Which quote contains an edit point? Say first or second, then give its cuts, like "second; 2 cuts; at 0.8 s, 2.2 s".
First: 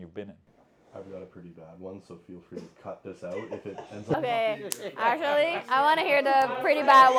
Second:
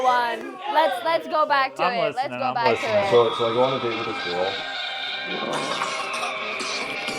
second; 1 cut; at 4.7 s